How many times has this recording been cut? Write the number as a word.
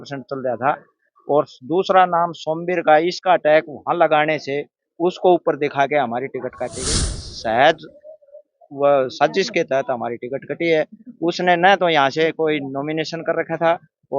one